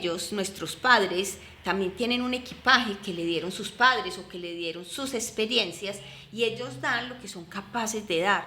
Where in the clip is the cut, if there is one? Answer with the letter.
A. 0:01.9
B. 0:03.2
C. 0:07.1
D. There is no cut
D